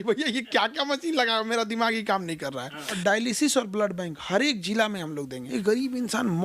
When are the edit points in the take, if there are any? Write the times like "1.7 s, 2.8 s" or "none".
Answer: 2.9 s, 5.5 s